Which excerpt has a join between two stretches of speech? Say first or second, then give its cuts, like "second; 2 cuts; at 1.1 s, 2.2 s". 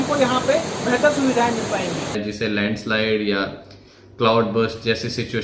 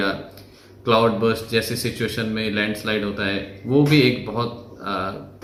first; 1 cut; at 2.1 s